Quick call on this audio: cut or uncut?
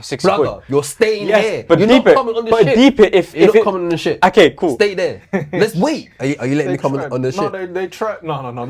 cut